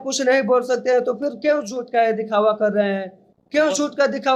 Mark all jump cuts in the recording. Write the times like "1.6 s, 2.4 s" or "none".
none